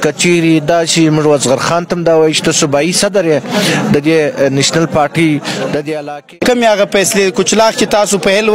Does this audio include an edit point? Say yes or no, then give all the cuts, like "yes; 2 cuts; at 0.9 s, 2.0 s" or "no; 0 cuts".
yes; 1 cut; at 6.3 s